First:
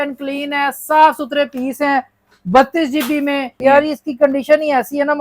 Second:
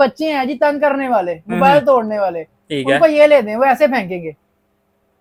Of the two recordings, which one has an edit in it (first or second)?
first